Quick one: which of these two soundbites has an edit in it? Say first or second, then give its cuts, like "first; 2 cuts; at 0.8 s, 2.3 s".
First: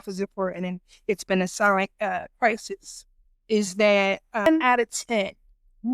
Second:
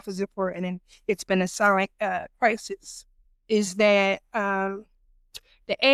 first; 1 cut; at 4.5 s